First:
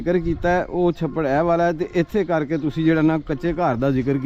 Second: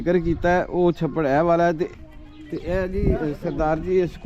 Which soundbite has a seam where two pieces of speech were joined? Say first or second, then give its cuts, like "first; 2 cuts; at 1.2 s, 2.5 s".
second; 1 cut; at 1.9 s